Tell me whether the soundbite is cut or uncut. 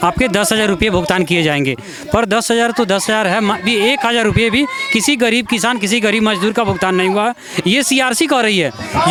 uncut